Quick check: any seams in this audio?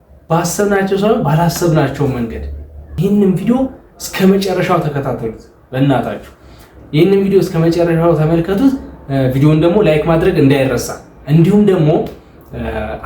yes; 1 cut; at 2.9 s

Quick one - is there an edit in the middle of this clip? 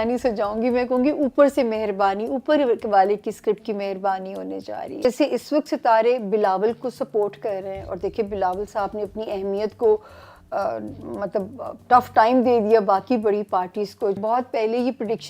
yes; 2 cuts; at 5.0 s, 14.2 s

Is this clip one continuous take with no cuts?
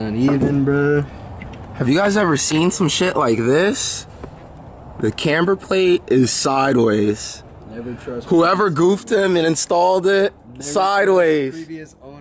yes; 0 cuts

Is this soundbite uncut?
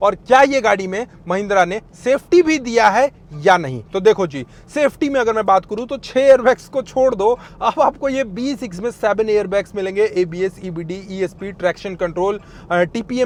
yes; 0 cuts

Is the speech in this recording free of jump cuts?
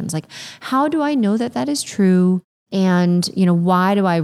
no; 1 cut; at 2.6 s

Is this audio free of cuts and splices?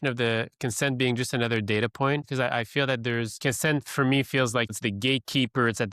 no; 3 cuts; at 2.2 s, 3.4 s, 4.7 s

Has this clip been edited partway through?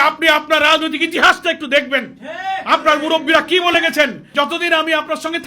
yes; 1 cut; at 4.2 s

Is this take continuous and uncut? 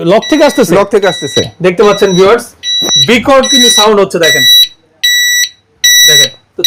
yes; 0 cuts

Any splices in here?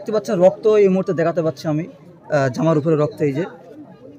no; 0 cuts

